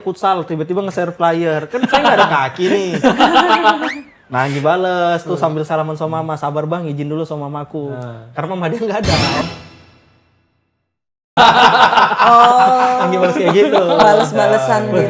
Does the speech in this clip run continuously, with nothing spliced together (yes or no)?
yes